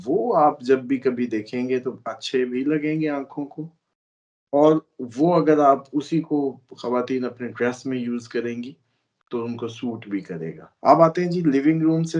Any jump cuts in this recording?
yes; 1 cut; at 10.6 s

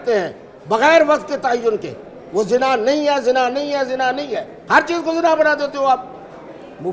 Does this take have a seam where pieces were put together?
no; 0 cuts

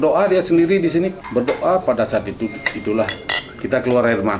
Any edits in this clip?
yes; 1 cut; at 1.2 s

